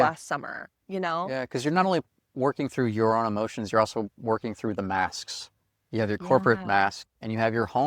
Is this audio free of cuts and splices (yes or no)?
yes